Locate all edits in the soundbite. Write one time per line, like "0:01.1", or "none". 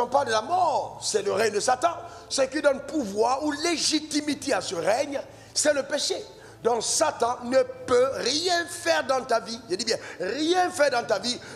none